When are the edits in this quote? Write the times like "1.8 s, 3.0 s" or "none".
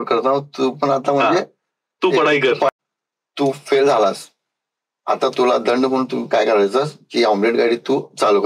2.7 s